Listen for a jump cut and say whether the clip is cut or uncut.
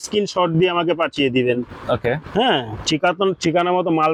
uncut